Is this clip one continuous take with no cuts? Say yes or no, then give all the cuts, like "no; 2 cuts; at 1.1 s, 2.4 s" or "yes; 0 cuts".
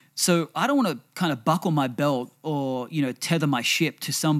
yes; 0 cuts